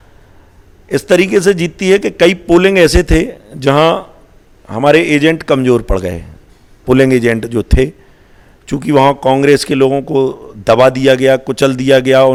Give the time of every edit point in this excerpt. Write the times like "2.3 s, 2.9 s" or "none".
none